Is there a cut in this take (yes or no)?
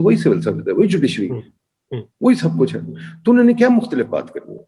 no